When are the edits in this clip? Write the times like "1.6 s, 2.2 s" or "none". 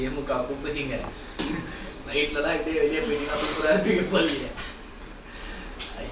1.4 s